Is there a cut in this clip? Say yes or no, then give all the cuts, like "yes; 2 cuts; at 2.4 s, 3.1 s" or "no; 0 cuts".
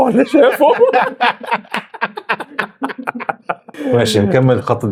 no; 0 cuts